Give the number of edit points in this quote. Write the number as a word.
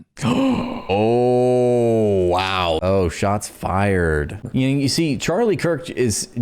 one